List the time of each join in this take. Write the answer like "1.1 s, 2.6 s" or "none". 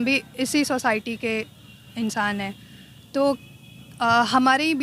none